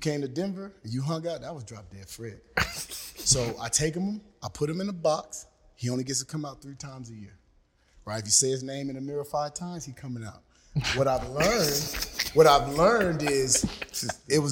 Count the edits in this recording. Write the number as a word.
zero